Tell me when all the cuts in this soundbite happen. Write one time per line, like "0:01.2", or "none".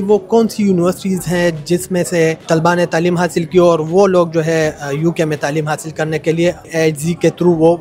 0:06.7

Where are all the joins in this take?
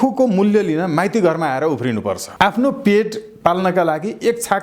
0:02.2

